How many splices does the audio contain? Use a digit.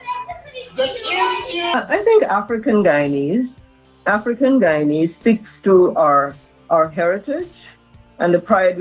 1